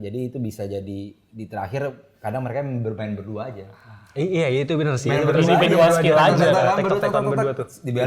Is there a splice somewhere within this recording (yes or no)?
no